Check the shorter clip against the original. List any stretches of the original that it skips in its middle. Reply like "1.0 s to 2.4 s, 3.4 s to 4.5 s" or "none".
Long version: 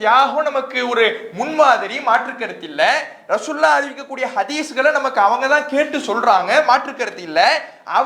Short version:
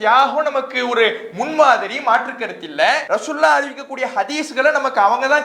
3.0 s to 3.2 s